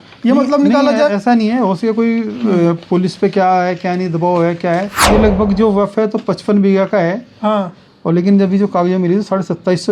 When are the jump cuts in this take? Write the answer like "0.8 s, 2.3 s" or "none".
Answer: 4.9 s